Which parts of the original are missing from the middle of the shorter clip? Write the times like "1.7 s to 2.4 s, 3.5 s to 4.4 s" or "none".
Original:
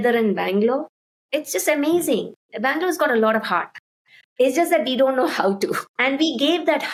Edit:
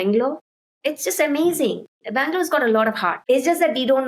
3.6 s to 4.2 s